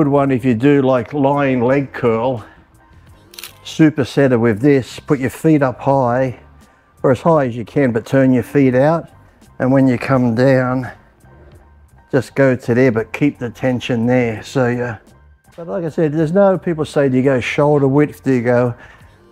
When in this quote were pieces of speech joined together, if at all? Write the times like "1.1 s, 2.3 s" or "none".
15.8 s